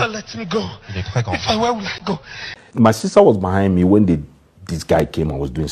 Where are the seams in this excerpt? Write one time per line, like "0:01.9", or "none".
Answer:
0:02.5